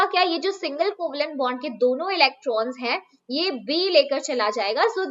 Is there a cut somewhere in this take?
no; 0 cuts

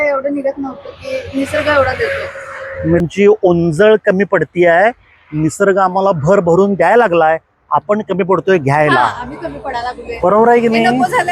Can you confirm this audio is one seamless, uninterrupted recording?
no; 1 cut; at 3.0 s

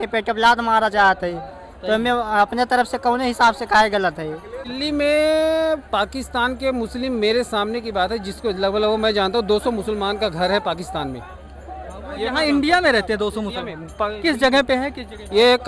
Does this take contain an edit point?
yes; 1 cut; at 4.7 s

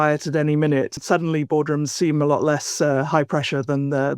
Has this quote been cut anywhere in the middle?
yes; 1 cut; at 1.0 s

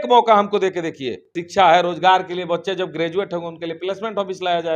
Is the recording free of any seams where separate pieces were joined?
no; 1 cut; at 1.4 s

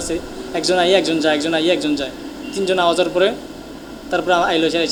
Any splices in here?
no; 0 cuts

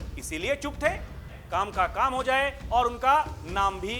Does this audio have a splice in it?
yes; 1 cut; at 1.4 s

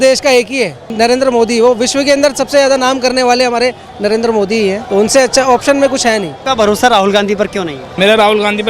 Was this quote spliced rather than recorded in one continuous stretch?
yes; 4 cuts; at 0.9 s, 4.8 s, 6.3 s, 7.8 s

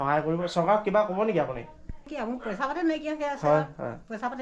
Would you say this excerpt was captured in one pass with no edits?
no; 1 cut; at 2.0 s

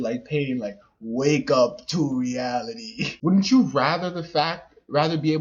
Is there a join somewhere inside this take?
yes; 1 cut; at 3.1 s

